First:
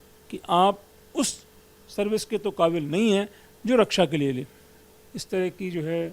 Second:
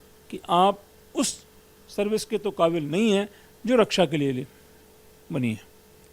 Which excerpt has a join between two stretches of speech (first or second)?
first